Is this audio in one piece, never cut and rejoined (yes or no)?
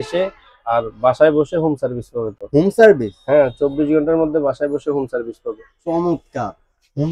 yes